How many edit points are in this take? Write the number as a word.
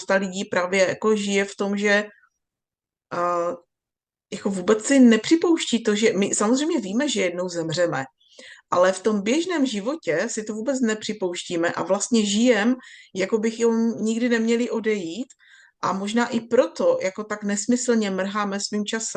zero